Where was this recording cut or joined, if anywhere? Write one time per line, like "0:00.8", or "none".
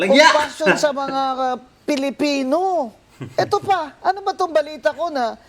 0:03.9